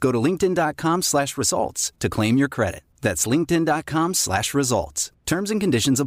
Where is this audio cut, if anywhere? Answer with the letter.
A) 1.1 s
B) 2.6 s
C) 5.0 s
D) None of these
D